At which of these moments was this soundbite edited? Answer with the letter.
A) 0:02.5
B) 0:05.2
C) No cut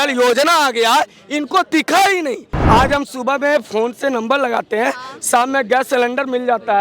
A